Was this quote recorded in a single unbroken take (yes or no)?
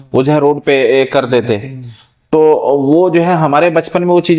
yes